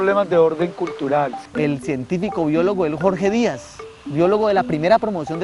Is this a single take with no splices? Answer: no; 1 cut; at 1.4 s

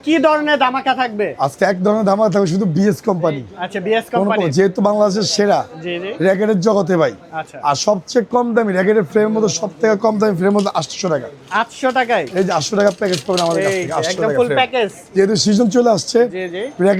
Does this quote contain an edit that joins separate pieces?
no; 0 cuts

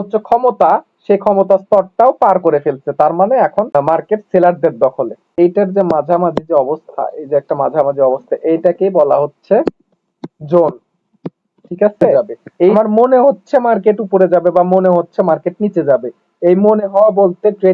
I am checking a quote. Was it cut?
yes; 3 cuts; at 3.8 s, 5.3 s, 12.7 s

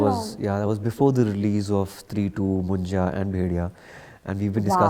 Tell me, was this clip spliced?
no; 0 cuts

